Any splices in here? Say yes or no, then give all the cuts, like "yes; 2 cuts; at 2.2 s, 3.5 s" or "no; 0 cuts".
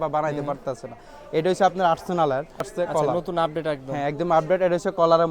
yes; 1 cut; at 2.7 s